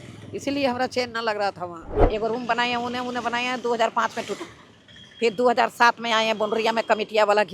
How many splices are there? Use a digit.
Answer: 1